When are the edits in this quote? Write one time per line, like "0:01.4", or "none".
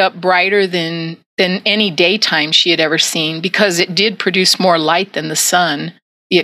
none